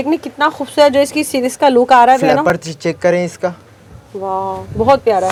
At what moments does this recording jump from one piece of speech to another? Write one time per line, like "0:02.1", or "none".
none